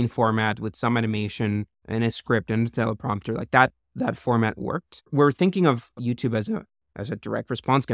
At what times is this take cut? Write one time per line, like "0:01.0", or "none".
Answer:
0:01.8
0:05.1